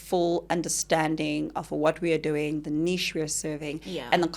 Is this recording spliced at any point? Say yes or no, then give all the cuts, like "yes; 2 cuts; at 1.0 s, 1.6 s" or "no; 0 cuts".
no; 0 cuts